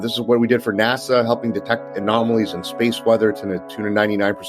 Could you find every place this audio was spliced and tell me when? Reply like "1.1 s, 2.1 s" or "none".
none